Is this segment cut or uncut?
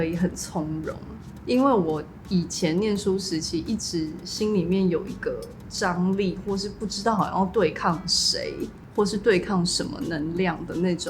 uncut